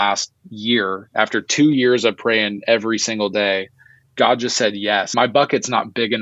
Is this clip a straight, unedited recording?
yes; 0 cuts

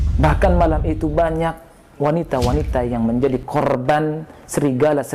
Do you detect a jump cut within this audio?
no; 0 cuts

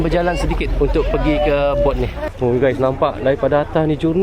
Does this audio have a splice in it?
yes; 1 cut; at 2.2 s

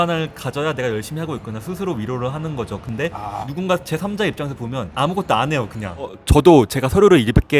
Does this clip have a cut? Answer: yes; 3 cuts; at 3.0 s, 4.9 s, 6.2 s

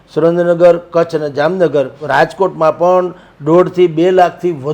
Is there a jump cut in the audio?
yes; 1 cut; at 2.0 s

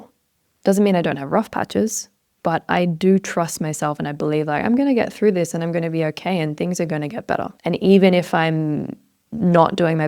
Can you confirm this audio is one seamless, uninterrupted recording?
no; 1 cut; at 7.5 s

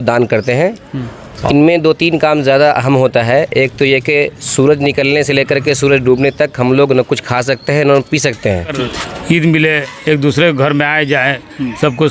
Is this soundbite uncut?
no; 2 cuts; at 1.4 s, 8.9 s

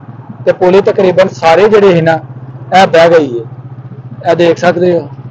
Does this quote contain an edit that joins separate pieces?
no; 0 cuts

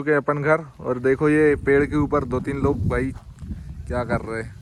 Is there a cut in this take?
no; 0 cuts

